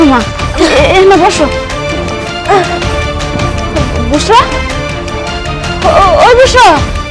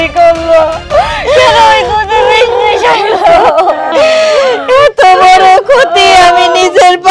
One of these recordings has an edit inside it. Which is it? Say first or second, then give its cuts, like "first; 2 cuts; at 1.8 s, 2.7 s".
second; 1 cut; at 3.9 s